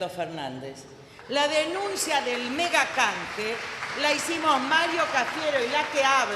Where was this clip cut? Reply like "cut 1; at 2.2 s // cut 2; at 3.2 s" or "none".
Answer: cut 1; at 4.2 s